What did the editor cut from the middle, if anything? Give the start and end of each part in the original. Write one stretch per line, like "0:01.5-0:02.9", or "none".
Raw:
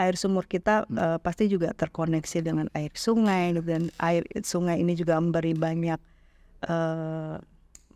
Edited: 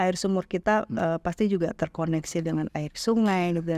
none

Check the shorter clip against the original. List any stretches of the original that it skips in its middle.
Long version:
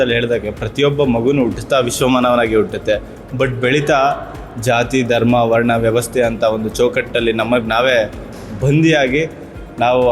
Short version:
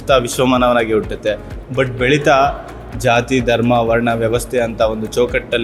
none

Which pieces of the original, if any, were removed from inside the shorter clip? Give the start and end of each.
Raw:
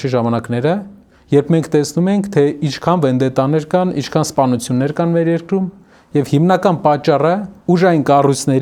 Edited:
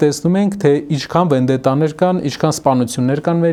none

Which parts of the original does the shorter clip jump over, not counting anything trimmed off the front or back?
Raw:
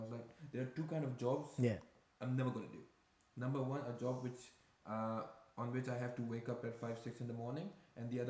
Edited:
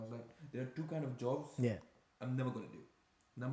none

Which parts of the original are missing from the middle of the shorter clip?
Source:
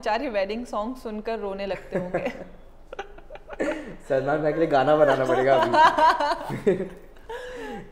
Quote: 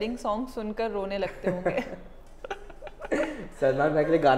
none

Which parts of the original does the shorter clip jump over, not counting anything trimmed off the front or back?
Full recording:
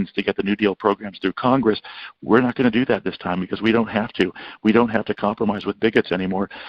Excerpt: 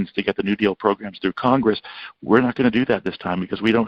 none

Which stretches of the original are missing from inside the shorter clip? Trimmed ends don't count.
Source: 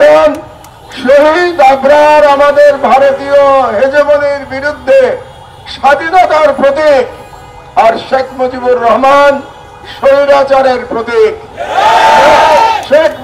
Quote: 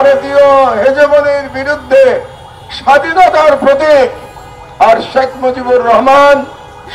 none

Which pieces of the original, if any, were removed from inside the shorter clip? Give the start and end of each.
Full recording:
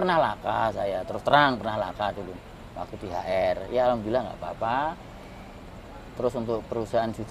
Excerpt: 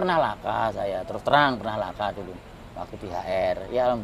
none

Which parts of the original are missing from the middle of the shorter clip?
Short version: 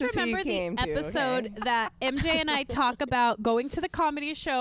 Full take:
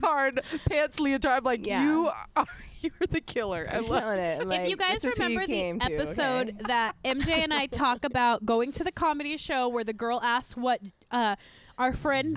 none

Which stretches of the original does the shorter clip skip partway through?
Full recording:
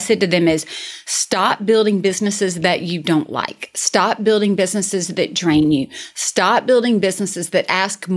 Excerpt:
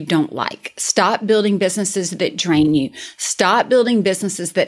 none

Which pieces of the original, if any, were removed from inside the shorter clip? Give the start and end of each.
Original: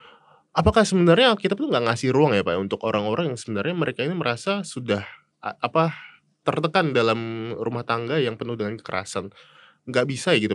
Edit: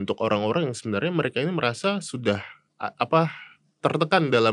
none

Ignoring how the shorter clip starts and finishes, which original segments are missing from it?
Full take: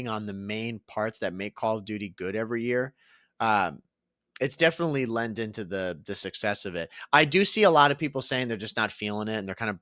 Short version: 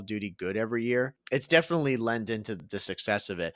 0:03.0-0:04.3
0:05.7-0:06.0

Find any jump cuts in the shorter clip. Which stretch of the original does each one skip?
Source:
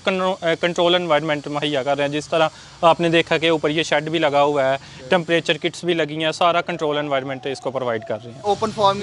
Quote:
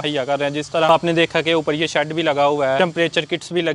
0:02.5-0:02.8
0:04.7-0:05.1

